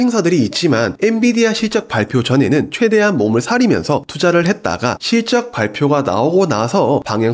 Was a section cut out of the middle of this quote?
no; 0 cuts

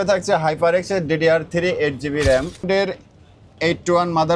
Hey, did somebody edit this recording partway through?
yes; 1 cut; at 2.6 s

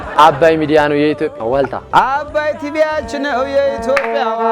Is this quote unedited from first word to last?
no; 1 cut; at 1.3 s

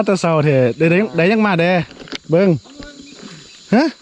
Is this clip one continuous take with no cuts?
yes; 0 cuts

